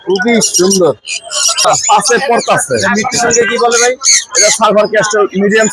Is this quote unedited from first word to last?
no; 1 cut; at 1.6 s

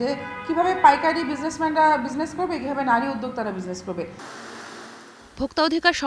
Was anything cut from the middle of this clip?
no; 0 cuts

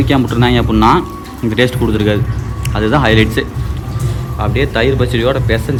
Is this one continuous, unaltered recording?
yes; 0 cuts

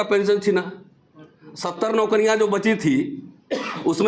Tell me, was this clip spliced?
no; 0 cuts

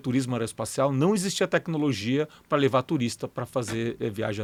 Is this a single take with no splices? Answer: yes; 0 cuts

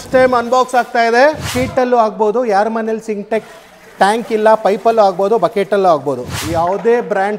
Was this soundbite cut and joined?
yes; 2 cuts; at 1.5 s, 6.3 s

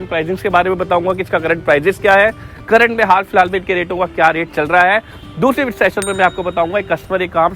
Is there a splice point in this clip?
no; 0 cuts

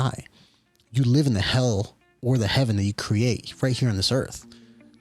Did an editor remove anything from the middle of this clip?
no; 0 cuts

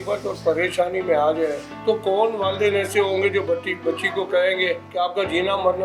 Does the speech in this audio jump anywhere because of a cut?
yes; 2 cuts; at 1.7 s, 4.9 s

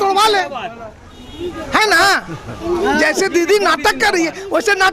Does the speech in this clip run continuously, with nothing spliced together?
yes; 0 cuts

